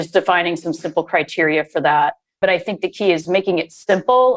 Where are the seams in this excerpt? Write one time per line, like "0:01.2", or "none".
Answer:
0:02.3
0:03.2

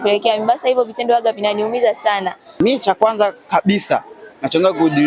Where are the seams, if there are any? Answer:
0:02.5

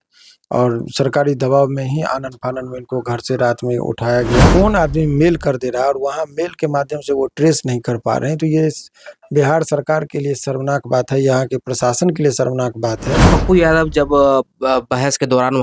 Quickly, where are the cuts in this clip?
0:04.5
0:13.3

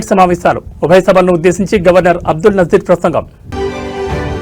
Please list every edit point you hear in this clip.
none

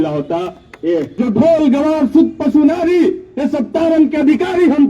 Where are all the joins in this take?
0:01.1

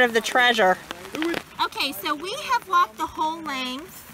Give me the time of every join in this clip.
0:01.4

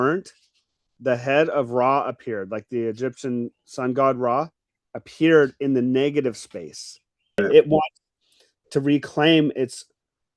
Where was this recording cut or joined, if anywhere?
0:07.4

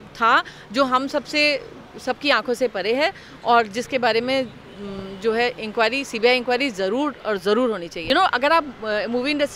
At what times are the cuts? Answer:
0:08.0

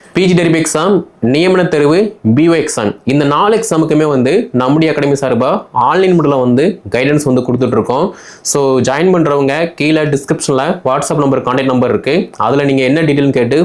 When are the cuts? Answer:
none

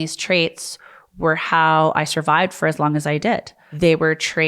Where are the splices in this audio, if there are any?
0:03.6

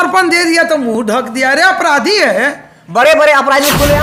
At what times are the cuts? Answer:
none

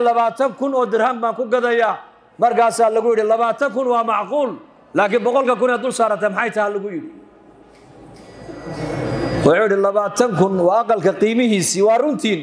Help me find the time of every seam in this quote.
none

